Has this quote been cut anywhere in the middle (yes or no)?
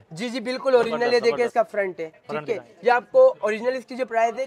no